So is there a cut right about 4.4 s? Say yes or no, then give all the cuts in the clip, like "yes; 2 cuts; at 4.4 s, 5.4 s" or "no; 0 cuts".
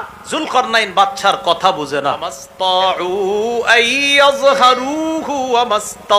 no; 1 cut; at 2.4 s